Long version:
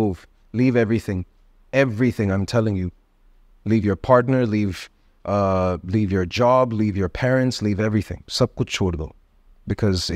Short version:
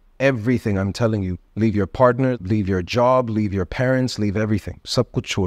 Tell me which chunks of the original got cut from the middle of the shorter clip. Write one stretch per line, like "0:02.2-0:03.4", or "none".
0:02.9-0:03.5
0:04.5-0:05.8